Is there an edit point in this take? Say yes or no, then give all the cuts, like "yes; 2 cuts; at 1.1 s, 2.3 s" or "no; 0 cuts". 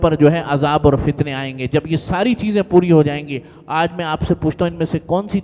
no; 0 cuts